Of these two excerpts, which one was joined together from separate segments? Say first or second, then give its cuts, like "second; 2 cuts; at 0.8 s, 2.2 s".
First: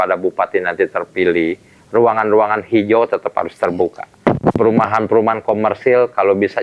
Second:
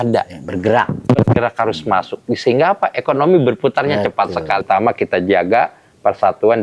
second; 1 cut; at 4.6 s